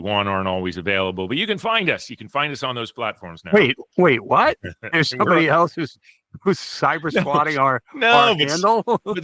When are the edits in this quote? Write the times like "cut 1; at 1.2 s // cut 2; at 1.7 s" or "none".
none